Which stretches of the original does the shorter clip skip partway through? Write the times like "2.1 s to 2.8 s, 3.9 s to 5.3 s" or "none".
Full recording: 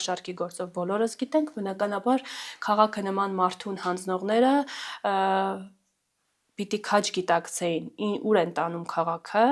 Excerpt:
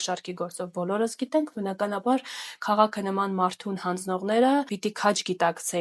4.7 s to 6.6 s